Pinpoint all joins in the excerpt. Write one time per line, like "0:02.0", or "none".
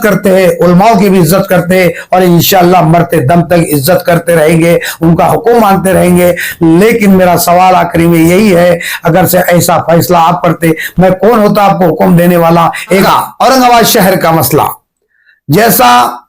0:13.0